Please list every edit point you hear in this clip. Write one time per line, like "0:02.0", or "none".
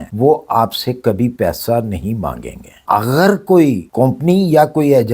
0:02.8